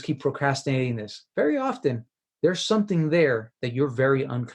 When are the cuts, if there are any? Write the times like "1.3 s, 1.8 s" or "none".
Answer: 1.1 s